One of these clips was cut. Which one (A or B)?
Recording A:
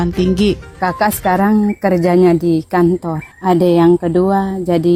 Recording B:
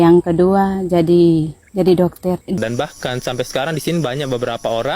B